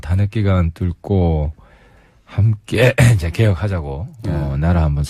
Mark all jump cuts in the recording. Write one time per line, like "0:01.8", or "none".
none